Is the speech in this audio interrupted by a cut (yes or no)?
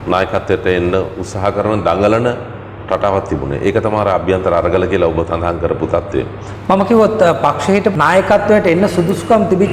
yes